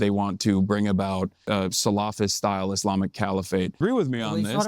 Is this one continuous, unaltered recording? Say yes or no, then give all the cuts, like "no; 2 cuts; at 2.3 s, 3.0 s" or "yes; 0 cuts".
no; 2 cuts; at 1.4 s, 3.8 s